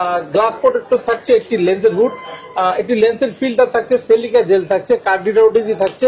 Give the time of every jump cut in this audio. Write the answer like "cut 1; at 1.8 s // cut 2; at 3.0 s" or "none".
none